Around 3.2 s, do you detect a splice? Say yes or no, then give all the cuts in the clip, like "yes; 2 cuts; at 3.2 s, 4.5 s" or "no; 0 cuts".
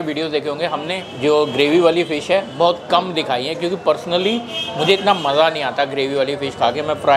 no; 1 cut; at 1.0 s